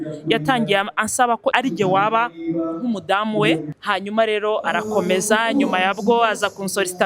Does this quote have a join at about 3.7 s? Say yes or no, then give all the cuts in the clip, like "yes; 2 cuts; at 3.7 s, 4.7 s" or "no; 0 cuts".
yes; 2 cuts; at 1.5 s, 3.7 s